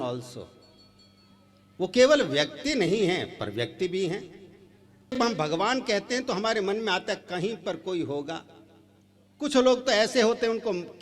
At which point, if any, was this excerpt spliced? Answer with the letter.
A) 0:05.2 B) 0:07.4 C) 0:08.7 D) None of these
A